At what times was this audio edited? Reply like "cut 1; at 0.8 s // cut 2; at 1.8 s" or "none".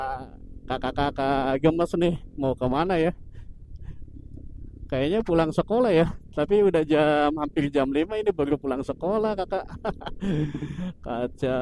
none